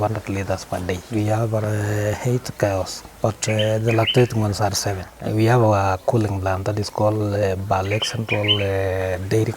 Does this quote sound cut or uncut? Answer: cut